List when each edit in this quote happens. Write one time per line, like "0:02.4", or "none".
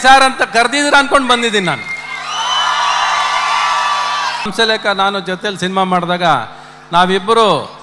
0:04.5